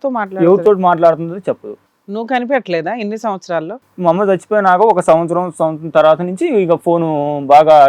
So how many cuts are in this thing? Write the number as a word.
one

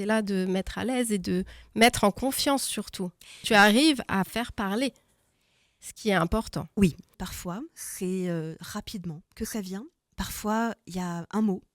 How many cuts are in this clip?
two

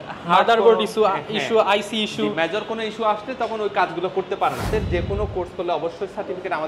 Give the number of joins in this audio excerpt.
one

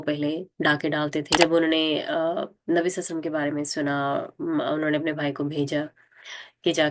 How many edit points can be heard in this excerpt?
one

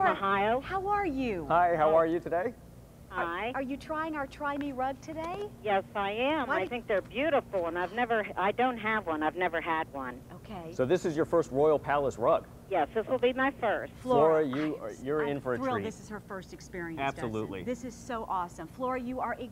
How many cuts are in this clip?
zero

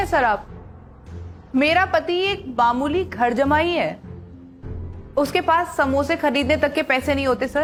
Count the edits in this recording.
zero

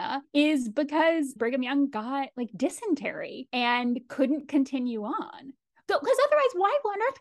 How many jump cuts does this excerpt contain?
one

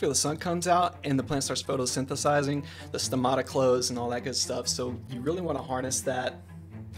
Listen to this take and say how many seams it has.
zero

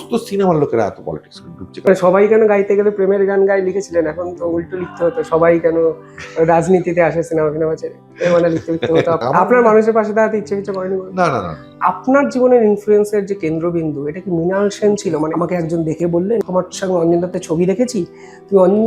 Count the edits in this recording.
five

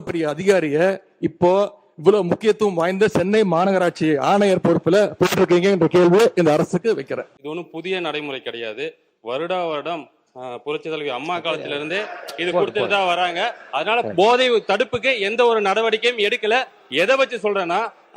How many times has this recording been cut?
one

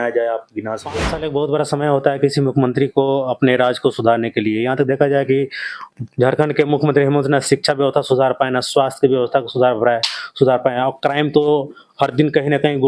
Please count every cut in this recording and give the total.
one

